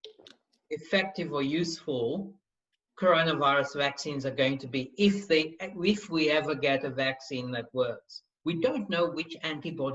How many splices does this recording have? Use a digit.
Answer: 1